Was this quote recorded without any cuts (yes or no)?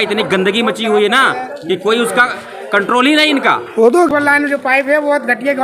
no